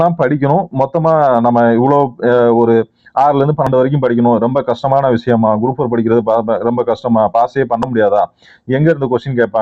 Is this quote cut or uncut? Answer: uncut